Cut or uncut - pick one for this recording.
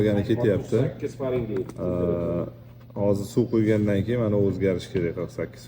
uncut